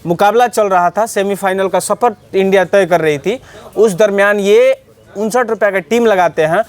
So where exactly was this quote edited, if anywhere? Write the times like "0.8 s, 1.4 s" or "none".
none

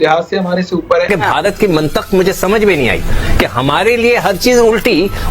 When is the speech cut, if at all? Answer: 1.1 s

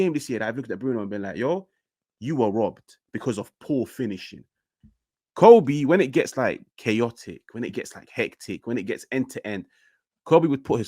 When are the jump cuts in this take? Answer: 4.7 s

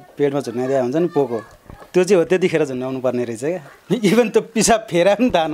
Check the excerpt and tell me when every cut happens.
none

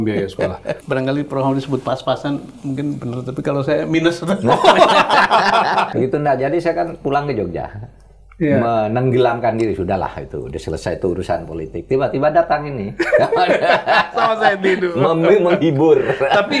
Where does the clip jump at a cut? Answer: 0.8 s, 5.9 s

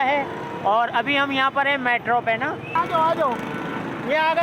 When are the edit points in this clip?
2.8 s

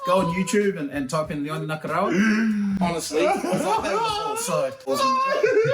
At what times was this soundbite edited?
4.8 s

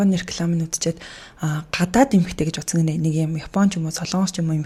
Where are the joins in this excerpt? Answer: none

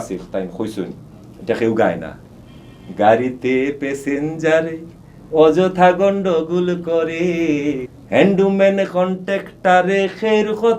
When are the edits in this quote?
7.8 s

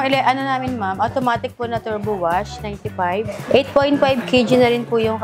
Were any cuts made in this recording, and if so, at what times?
3.4 s

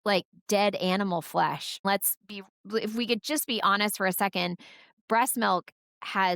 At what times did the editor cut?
1.8 s

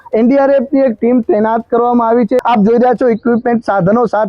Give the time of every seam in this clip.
2.4 s

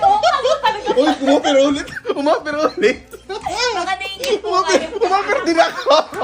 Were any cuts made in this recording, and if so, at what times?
none

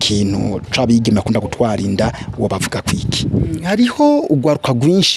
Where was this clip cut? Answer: 3.5 s

